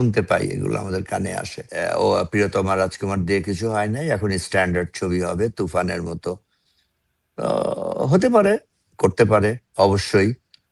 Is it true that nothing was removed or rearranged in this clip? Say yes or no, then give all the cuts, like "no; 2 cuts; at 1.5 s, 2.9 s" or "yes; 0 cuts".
no; 1 cut; at 1.7 s